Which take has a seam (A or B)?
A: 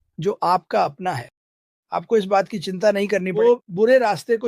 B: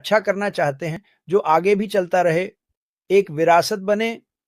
A